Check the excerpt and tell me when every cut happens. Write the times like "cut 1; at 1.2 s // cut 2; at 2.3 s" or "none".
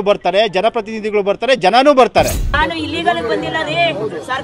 cut 1; at 2.6 s